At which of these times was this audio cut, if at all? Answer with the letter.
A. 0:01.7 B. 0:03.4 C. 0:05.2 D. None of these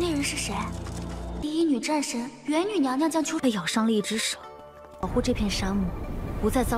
B